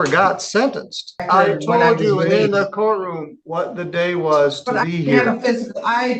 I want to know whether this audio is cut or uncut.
cut